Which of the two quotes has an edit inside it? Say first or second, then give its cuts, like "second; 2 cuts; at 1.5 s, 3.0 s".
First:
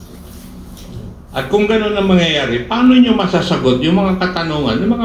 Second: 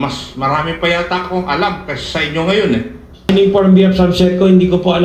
second; 1 cut; at 3.3 s